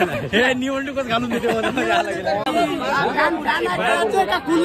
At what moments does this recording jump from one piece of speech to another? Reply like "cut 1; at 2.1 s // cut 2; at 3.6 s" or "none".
cut 1; at 2.5 s